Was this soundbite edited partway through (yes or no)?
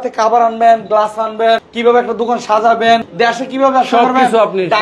yes